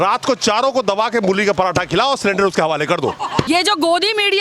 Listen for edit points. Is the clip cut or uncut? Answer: cut